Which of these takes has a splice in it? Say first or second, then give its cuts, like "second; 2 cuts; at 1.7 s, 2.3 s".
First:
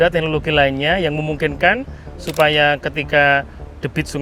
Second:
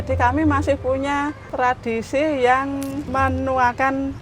second; 2 cuts; at 1.4 s, 3.1 s